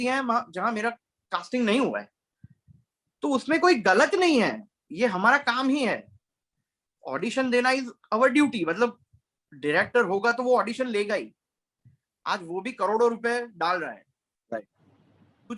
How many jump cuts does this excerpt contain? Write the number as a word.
zero